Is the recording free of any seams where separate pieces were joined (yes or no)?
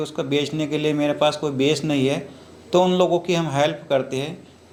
yes